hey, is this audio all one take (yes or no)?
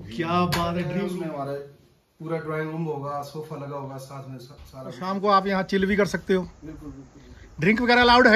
no